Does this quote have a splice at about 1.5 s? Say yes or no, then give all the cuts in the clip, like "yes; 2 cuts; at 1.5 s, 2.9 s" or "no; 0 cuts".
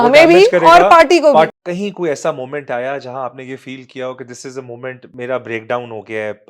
yes; 2 cuts; at 1.5 s, 5.1 s